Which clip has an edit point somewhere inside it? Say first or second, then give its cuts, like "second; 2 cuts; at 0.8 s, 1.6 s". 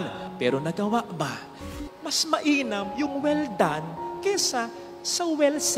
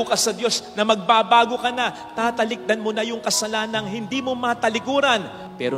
first; 1 cut; at 1.6 s